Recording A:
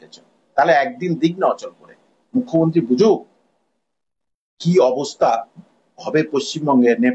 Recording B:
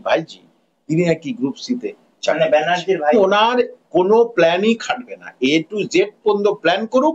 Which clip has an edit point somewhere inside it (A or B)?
B